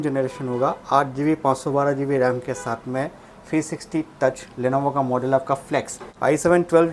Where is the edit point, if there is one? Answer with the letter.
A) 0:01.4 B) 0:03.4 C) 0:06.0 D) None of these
C